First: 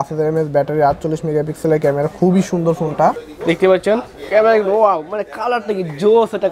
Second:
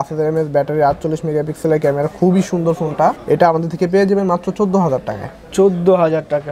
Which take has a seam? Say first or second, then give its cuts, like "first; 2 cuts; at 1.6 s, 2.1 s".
first; 1 cut; at 3.2 s